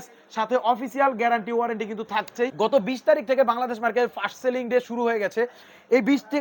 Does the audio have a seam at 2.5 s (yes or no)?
yes